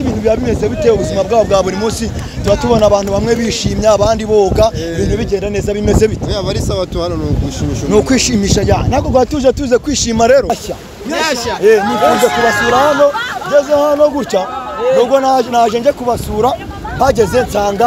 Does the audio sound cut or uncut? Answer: cut